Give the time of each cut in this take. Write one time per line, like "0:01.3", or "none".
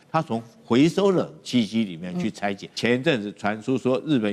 0:02.7